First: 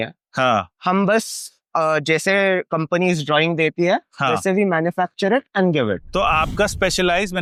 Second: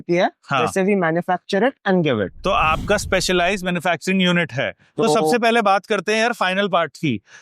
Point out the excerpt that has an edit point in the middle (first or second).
second